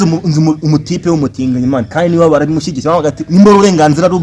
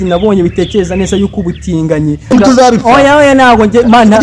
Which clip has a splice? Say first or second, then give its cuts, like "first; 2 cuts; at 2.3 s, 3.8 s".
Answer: second; 1 cut; at 2.3 s